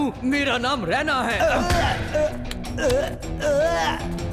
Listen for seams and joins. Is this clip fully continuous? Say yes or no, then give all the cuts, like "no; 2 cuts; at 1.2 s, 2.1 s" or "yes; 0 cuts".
yes; 0 cuts